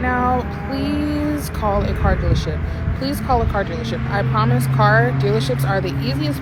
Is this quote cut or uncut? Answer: uncut